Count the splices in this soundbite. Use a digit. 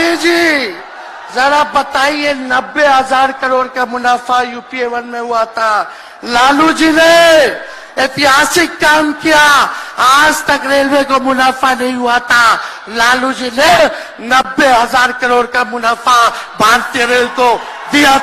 0